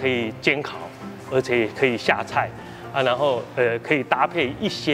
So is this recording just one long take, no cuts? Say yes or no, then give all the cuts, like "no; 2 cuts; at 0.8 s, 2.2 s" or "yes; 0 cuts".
yes; 0 cuts